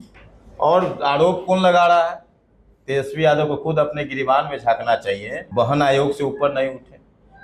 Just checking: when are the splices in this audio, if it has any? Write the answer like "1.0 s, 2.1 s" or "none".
5.4 s